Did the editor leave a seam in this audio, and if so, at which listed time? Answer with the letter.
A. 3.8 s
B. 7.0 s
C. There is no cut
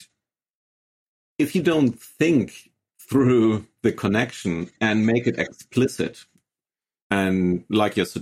B